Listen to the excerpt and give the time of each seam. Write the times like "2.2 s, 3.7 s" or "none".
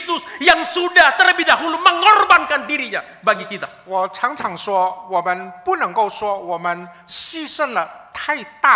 none